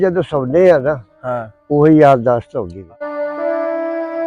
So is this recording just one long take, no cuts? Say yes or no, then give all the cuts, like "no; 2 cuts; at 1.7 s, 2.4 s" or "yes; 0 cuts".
no; 1 cut; at 3.0 s